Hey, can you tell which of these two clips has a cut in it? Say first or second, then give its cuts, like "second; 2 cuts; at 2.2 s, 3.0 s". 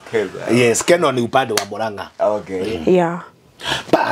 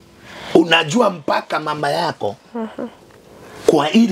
first; 1 cut; at 2.7 s